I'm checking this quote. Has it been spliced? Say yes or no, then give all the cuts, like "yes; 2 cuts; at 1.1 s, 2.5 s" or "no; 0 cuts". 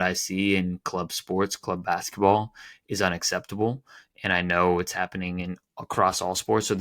no; 0 cuts